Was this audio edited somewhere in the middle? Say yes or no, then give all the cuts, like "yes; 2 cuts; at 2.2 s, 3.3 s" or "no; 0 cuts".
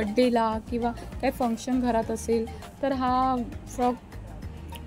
no; 0 cuts